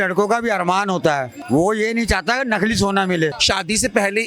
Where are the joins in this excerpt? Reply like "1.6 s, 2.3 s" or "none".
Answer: 1.3 s, 3.4 s